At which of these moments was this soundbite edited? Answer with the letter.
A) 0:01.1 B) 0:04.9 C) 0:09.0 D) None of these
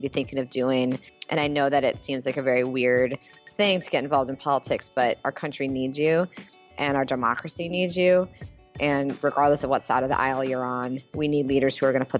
A